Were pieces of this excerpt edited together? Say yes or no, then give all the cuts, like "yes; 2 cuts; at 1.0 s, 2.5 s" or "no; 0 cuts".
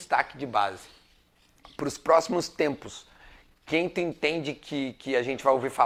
no; 0 cuts